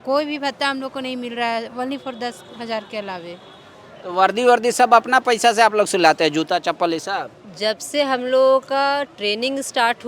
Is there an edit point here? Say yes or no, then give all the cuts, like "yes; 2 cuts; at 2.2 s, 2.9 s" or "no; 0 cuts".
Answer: no; 0 cuts